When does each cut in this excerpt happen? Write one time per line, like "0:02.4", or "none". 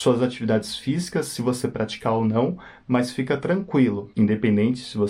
0:04.0